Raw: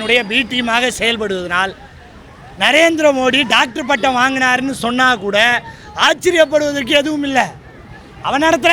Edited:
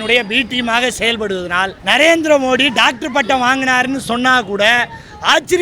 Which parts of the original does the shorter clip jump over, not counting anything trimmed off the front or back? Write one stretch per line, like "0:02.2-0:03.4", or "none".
0:01.8-0:02.5